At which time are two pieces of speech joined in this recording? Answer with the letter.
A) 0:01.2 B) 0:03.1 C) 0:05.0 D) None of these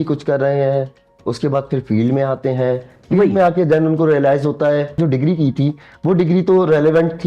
C